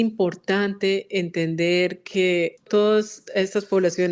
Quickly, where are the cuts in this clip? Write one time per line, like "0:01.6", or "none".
0:02.6